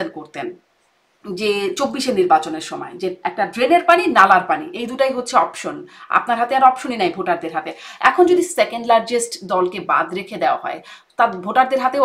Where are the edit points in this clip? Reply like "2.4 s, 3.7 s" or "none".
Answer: none